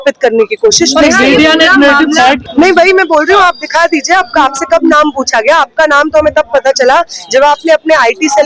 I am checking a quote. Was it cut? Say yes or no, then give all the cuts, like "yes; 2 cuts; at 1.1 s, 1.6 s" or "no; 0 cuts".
no; 0 cuts